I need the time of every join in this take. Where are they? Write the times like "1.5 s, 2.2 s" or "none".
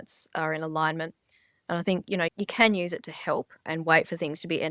2.3 s, 3.7 s